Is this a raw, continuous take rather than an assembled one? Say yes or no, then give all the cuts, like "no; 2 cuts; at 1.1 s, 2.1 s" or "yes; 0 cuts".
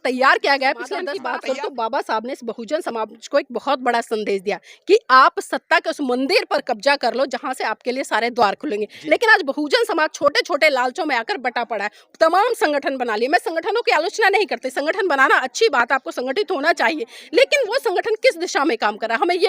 no; 1 cut; at 1.1 s